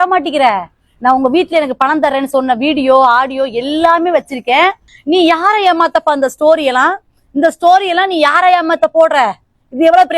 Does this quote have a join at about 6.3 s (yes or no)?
no